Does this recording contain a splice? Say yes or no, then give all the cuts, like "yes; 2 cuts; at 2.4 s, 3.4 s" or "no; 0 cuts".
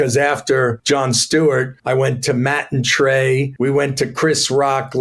yes; 3 cuts; at 0.8 s, 1.8 s, 3.5 s